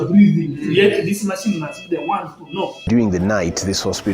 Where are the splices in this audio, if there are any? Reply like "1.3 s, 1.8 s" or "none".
2.9 s